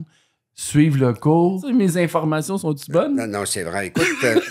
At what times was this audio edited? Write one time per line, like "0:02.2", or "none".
0:01.6